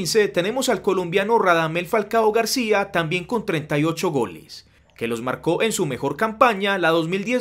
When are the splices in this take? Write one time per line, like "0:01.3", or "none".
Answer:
none